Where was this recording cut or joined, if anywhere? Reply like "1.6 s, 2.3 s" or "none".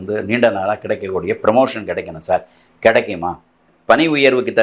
3.7 s